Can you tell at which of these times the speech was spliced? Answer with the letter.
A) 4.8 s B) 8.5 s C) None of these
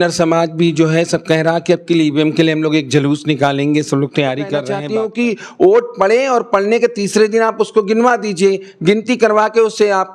A